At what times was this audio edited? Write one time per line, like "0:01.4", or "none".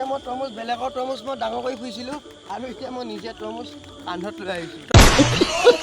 0:02.2
0:04.8